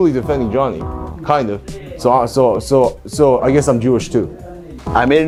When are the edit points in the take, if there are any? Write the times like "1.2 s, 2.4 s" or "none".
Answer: none